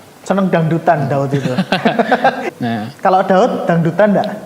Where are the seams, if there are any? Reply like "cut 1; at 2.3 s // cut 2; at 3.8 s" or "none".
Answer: cut 1; at 2.5 s